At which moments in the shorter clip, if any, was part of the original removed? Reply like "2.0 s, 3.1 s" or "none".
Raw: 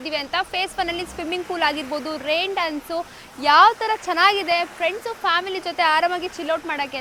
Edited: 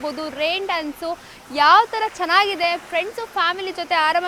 none